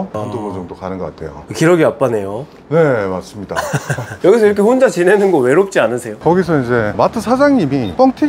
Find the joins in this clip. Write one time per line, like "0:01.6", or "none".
0:06.1